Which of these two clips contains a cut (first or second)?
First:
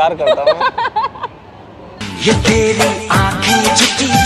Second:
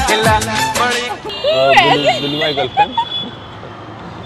second